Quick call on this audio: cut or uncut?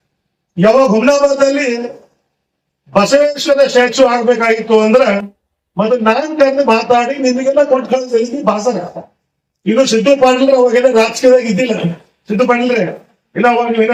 uncut